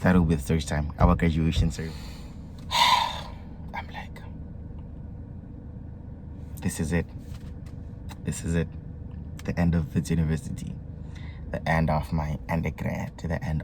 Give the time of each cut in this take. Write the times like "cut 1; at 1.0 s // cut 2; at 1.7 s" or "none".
cut 1; at 1.6 s